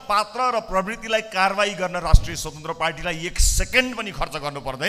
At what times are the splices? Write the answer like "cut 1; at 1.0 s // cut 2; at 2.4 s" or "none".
none